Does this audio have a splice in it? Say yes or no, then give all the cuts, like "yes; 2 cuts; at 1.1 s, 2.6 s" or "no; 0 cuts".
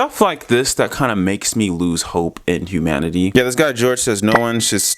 yes; 1 cut; at 3.3 s